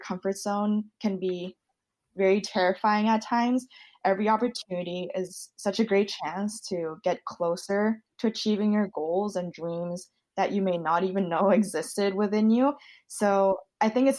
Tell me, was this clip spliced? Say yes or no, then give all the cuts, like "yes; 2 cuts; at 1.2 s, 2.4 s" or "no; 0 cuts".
no; 0 cuts